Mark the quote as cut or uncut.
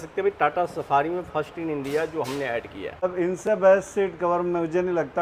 cut